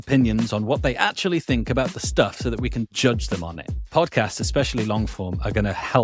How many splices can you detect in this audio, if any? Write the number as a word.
one